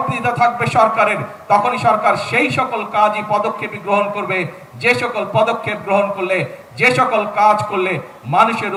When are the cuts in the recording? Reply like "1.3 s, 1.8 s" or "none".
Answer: none